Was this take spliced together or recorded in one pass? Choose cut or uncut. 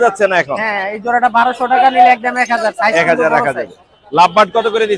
uncut